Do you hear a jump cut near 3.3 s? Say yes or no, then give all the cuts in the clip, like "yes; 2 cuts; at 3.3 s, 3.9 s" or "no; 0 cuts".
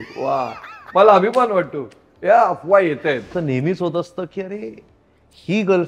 yes; 1 cut; at 3.3 s